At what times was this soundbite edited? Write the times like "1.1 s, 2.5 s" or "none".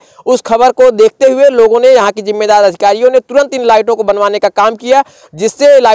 none